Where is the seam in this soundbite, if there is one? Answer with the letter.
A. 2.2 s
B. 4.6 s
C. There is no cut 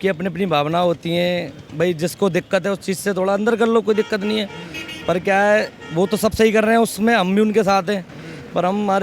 C